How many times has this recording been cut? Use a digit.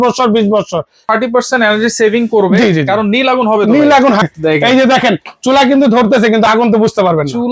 2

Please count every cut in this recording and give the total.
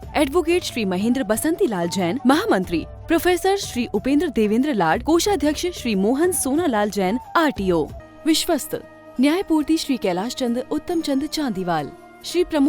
1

